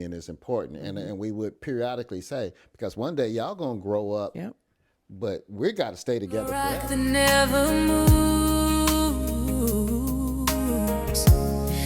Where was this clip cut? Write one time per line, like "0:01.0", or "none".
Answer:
0:04.3
0:06.5